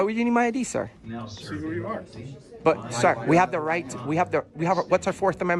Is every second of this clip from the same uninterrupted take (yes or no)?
yes